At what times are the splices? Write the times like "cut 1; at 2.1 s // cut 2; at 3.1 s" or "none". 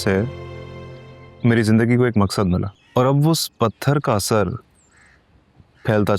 cut 1; at 2.8 s